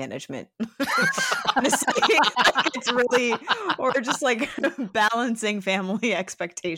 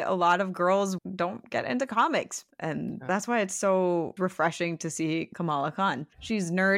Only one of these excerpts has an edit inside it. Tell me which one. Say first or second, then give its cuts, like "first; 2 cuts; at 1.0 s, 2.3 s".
second; 4 cuts; at 1.0 s, 2.5 s, 4.1 s, 5.6 s